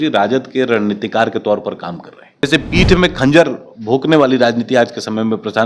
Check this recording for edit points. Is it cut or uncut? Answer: cut